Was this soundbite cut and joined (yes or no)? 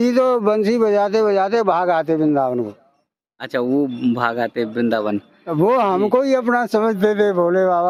no